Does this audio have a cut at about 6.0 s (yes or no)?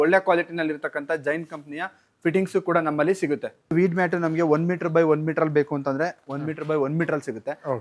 no